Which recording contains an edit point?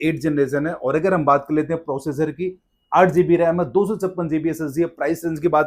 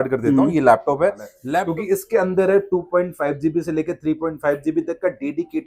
second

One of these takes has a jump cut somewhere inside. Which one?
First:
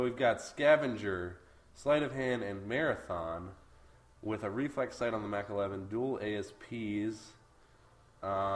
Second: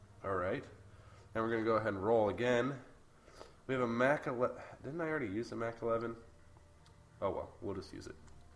first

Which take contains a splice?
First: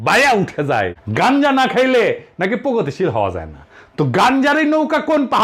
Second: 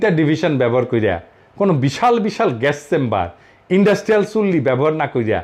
first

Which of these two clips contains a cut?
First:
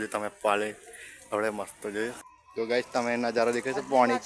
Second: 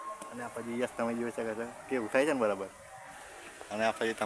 first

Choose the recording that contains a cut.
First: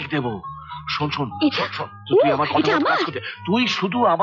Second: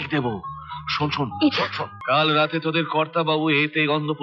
second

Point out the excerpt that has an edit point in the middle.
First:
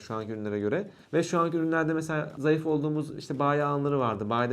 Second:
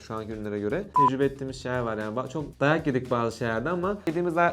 second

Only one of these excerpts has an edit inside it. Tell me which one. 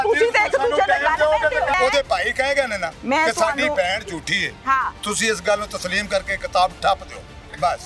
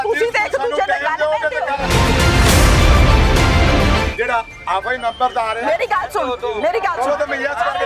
first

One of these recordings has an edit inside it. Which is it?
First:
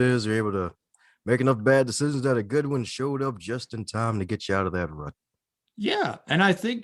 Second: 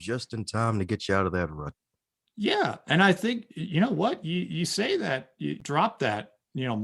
second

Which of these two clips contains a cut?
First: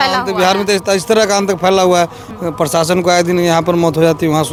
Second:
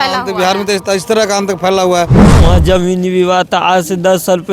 second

